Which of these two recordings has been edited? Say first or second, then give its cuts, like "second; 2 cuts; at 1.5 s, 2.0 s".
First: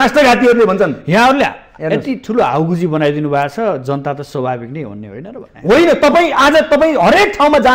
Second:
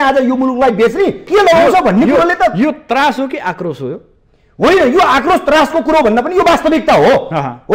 second; 1 cut; at 1.2 s